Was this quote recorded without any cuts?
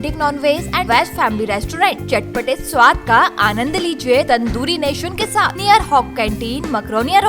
no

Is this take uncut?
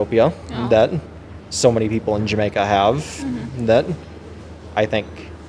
yes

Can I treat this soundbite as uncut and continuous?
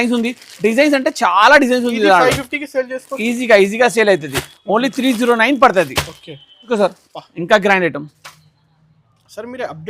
no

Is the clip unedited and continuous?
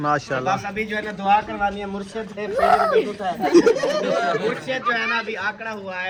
yes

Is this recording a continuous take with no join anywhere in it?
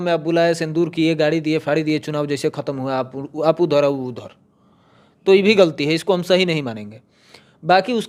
yes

